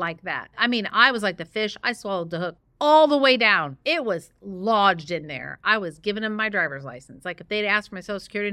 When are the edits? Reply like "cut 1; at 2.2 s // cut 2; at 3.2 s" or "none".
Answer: cut 1; at 2.6 s